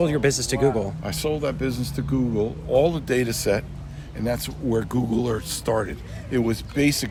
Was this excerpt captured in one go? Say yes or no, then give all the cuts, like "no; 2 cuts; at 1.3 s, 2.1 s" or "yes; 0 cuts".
yes; 0 cuts